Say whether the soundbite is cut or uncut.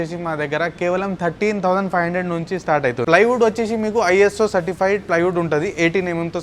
cut